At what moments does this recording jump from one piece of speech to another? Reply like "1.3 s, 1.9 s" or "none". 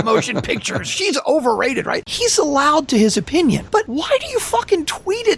2.1 s, 3.7 s

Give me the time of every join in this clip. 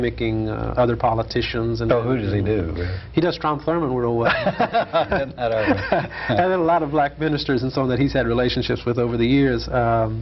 none

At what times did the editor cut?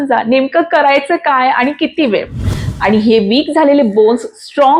2.6 s

